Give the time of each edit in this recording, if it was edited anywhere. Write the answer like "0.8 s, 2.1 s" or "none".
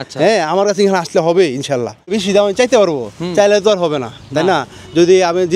2.2 s

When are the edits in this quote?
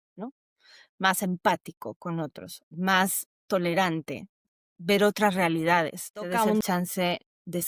4.4 s, 6.3 s

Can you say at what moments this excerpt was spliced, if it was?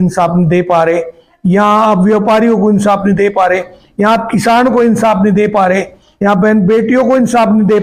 none

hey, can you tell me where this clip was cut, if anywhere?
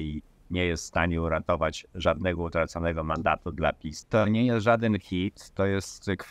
3.9 s

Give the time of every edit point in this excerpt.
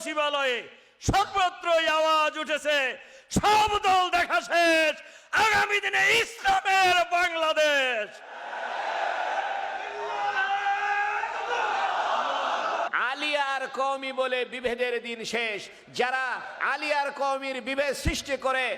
12.9 s

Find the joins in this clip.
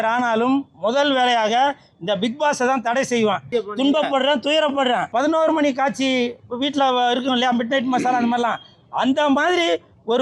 3.5 s, 5.1 s

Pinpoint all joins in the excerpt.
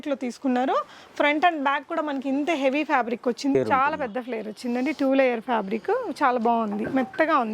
3.5 s

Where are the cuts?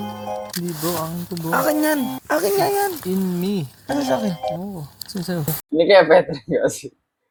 none

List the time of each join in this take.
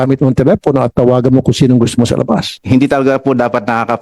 2.5 s

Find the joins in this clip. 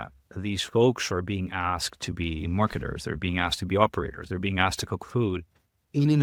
none

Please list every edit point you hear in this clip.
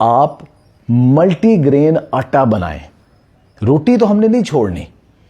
none

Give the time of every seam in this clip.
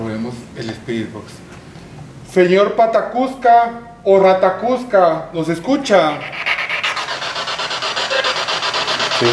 none

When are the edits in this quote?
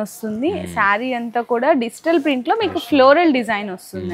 none

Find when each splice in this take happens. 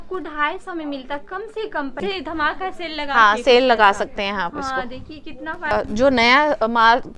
2.0 s, 5.7 s

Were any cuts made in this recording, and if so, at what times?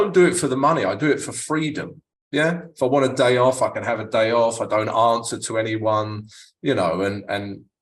none

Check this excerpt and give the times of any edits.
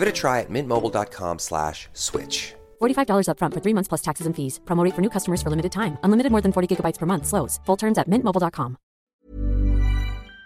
9.2 s

